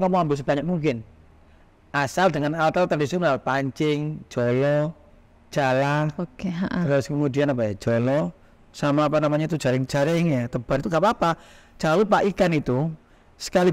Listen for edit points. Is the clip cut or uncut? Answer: uncut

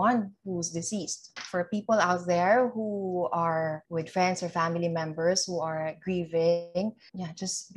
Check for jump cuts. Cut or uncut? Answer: cut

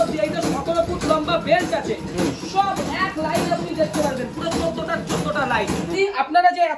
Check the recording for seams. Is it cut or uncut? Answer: cut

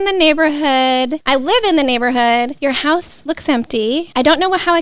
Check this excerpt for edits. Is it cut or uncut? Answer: cut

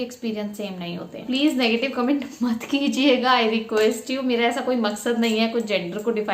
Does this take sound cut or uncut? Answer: cut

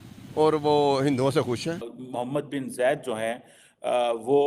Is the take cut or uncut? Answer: cut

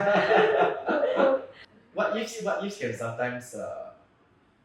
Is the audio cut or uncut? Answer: cut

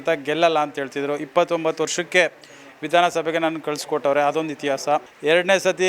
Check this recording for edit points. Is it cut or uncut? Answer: uncut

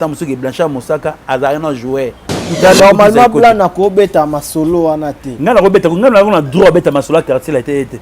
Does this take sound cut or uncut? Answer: cut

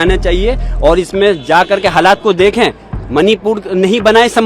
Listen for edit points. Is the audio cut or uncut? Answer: uncut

